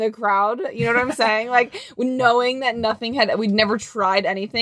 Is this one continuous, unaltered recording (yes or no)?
yes